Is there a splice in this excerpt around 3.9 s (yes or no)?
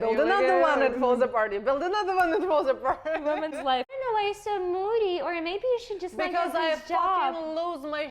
yes